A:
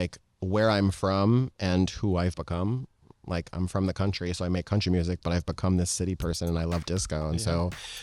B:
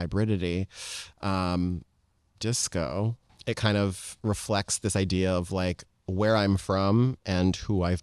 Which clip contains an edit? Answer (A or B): B